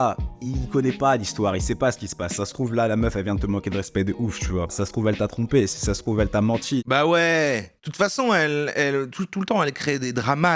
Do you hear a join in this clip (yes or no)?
yes